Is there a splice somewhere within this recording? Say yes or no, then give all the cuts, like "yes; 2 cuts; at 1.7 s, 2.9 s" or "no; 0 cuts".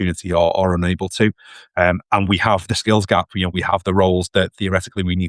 no; 0 cuts